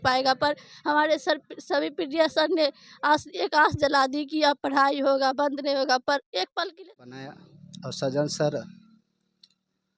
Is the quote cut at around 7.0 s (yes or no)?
yes